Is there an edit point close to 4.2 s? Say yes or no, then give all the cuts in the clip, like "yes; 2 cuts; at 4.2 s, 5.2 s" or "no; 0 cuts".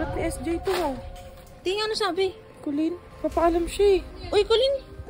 yes; 2 cuts; at 3.1 s, 4.2 s